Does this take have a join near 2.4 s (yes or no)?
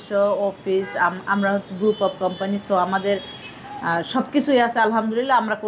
no